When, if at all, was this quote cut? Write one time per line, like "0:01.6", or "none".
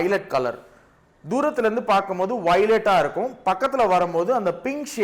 none